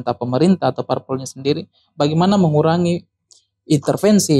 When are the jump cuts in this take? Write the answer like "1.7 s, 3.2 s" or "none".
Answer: none